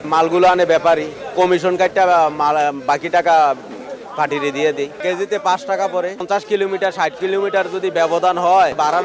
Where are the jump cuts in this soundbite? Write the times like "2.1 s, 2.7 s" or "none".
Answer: 5.0 s, 6.2 s